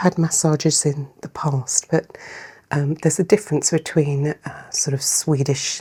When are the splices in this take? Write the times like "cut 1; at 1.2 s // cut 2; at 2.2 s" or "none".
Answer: none